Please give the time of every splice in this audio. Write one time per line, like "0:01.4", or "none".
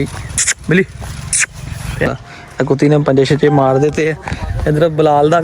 0:02.1